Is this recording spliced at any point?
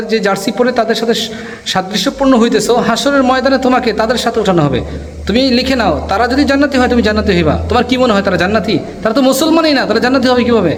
no; 0 cuts

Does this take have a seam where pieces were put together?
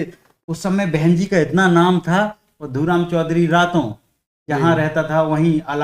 no; 0 cuts

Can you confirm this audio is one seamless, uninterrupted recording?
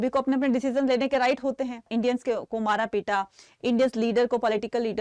no; 1 cut; at 1.9 s

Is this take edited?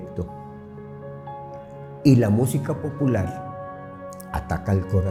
no; 0 cuts

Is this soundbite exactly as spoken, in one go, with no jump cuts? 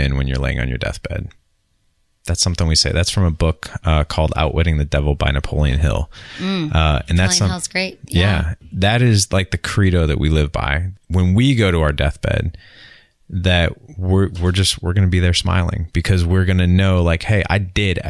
no; 2 cuts; at 8.6 s, 11.0 s

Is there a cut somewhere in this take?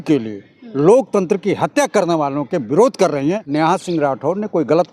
yes; 1 cut; at 3.4 s

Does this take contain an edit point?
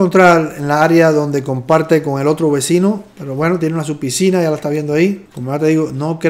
no; 0 cuts

